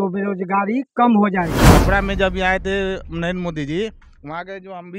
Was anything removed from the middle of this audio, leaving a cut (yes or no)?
yes